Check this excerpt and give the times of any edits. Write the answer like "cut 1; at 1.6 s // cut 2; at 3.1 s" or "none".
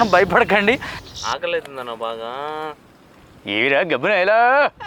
cut 1; at 0.9 s